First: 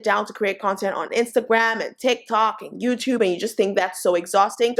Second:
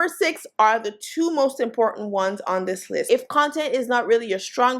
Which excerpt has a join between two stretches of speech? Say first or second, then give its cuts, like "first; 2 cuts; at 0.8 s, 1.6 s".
second; 1 cut; at 3.1 s